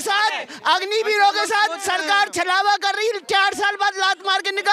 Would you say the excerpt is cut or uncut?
uncut